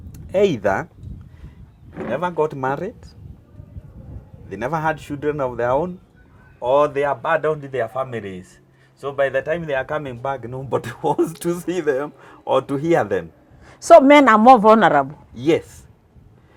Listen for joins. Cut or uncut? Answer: uncut